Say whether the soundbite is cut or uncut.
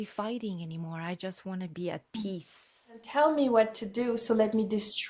cut